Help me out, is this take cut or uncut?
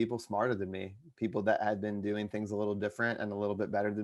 uncut